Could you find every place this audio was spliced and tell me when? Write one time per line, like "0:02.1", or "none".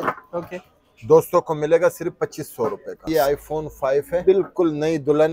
0:03.1
0:04.2